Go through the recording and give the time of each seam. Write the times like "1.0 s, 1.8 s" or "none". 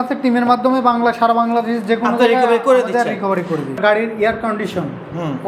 3.7 s